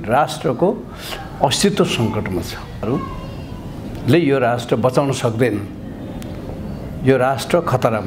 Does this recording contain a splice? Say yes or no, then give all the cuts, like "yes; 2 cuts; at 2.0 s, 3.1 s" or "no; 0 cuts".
yes; 1 cut; at 2.8 s